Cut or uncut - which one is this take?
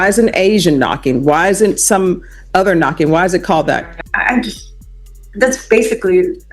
cut